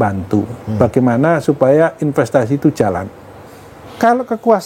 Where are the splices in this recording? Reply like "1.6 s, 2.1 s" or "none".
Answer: 3.5 s

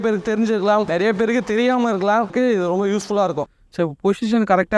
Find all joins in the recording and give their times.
0.9 s, 2.3 s, 3.5 s

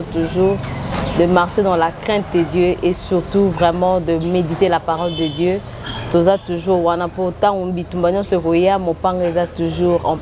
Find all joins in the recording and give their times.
none

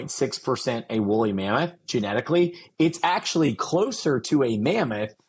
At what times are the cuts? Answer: none

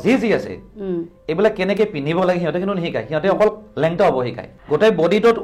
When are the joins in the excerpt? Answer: 4.5 s

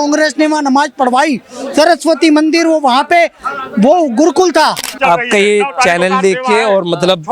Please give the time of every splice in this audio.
5.0 s

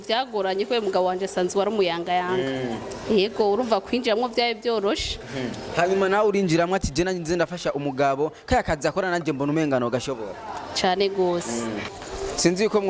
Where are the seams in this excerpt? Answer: 11.8 s

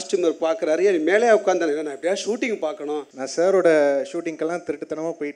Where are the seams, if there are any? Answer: 3.1 s

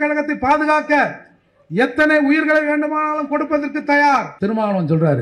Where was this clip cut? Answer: 4.3 s

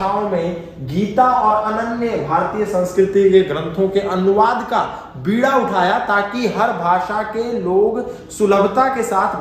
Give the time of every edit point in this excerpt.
none

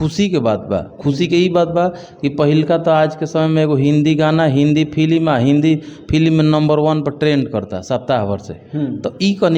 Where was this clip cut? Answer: none

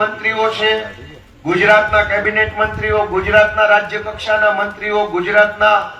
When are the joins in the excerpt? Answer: none

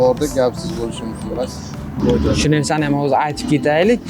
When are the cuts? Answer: 2.0 s

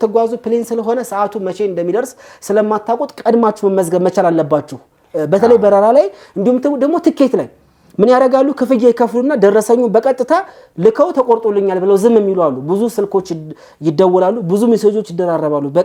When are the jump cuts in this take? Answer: none

